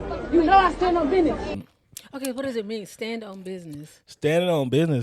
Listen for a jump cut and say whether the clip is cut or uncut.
cut